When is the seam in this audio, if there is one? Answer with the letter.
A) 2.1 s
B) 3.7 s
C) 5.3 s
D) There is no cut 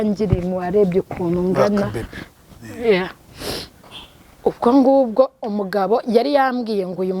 B